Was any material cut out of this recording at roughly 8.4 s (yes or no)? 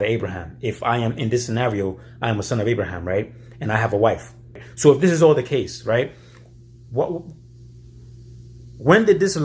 no